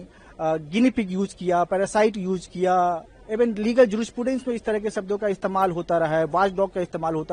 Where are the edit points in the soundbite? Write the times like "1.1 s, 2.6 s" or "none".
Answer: none